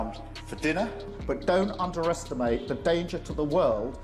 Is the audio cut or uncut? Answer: uncut